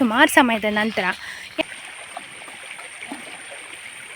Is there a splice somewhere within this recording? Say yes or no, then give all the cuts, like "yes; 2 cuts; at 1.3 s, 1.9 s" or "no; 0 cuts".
yes; 1 cut; at 1.6 s